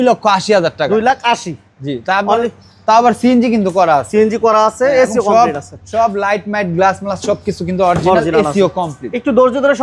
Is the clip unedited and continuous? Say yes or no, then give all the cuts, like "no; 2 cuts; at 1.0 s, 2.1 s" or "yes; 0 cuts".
yes; 0 cuts